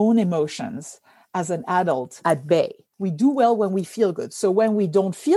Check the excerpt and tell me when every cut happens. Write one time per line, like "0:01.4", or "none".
0:02.9